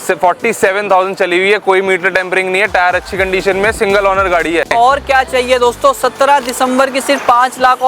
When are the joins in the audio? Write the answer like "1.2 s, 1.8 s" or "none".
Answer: 4.7 s